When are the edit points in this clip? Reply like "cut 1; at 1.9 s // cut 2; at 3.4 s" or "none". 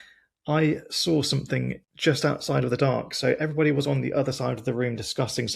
cut 1; at 1.8 s